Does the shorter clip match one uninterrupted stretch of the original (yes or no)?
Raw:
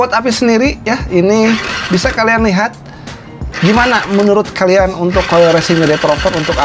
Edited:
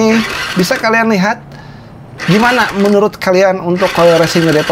yes